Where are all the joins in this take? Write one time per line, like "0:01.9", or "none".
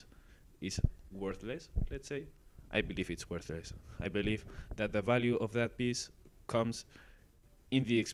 none